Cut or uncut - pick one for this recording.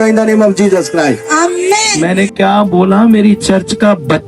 cut